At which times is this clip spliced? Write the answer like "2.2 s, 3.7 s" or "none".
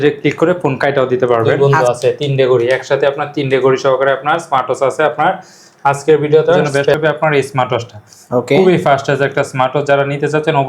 1.5 s, 6.8 s

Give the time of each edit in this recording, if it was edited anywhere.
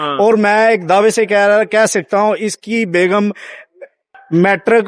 none

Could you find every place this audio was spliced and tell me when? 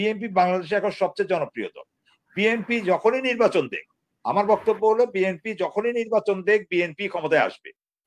none

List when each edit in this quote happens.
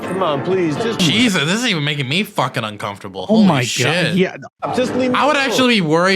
1.0 s, 4.5 s

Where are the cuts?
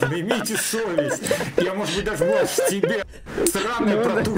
3.2 s

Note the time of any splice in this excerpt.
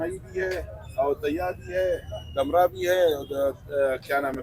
none

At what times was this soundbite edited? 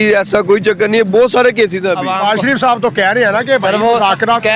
2.0 s

